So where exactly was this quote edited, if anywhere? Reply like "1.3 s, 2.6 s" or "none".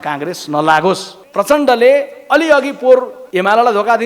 1.2 s, 3.2 s